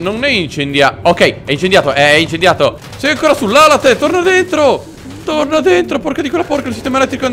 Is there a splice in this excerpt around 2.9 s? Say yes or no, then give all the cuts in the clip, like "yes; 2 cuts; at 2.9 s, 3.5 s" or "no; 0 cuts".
yes; 1 cut; at 2.9 s